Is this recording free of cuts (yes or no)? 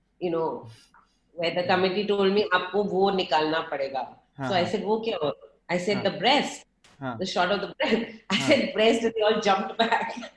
yes